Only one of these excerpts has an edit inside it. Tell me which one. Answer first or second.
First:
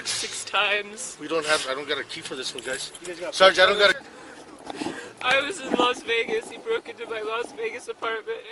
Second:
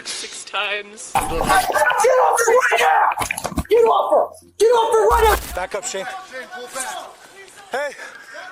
second